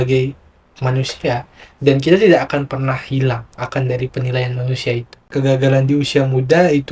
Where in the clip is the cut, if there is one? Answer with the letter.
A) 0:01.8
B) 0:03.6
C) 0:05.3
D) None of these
C